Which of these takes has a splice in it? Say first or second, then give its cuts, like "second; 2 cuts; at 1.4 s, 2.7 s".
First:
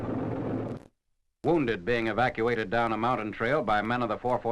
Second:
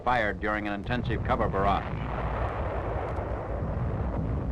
first; 1 cut; at 2.9 s